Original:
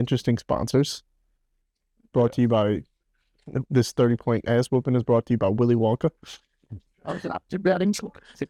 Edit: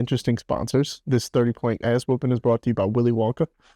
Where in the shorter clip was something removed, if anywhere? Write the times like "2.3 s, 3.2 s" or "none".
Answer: 1.0 s